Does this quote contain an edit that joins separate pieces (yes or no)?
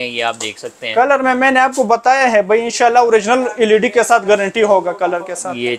no